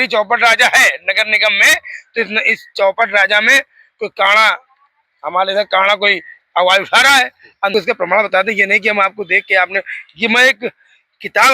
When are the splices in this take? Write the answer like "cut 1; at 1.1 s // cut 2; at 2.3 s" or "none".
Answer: cut 1; at 7.7 s